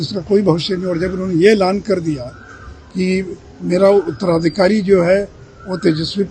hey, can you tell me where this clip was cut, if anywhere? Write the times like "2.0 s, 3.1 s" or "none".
none